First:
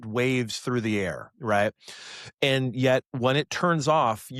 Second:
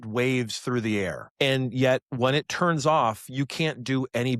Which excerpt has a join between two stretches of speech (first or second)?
second